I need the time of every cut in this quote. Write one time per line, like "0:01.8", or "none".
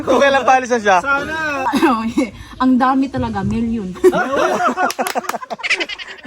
0:01.6